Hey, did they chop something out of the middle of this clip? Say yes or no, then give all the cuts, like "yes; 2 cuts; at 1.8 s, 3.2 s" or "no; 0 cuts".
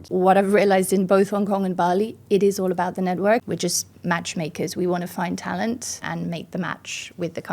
yes; 2 cuts; at 3.4 s, 6.0 s